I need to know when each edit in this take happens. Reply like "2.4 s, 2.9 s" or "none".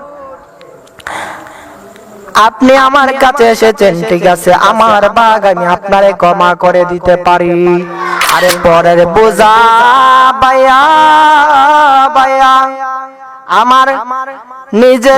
8.2 s

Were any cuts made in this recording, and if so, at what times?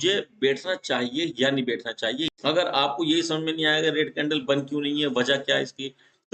2.0 s

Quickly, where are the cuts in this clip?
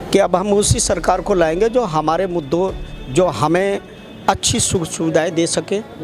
none

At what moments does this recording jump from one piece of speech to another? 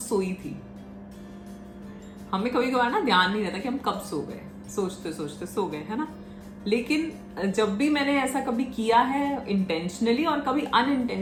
none

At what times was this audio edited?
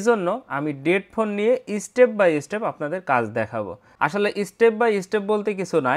3.8 s

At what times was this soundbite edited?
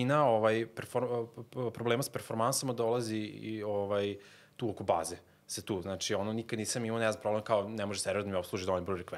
none

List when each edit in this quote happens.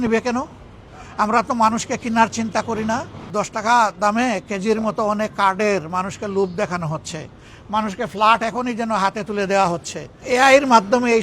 3.2 s, 10.1 s

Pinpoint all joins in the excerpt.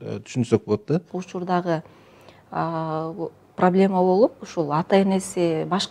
1.2 s

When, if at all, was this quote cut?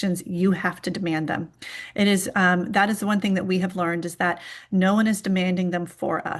none

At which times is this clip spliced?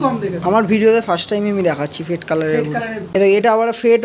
3.1 s

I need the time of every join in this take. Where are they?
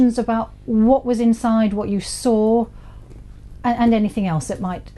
3.5 s

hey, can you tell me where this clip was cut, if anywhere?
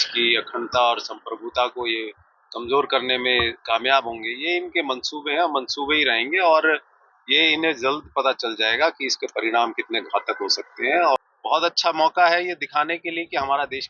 11.2 s

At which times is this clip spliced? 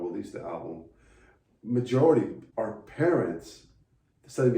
2.4 s

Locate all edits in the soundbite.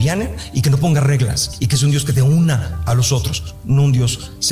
2.7 s

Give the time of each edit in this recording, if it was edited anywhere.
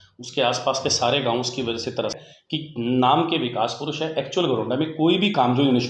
2.3 s

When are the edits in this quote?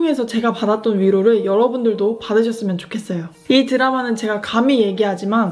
3.3 s

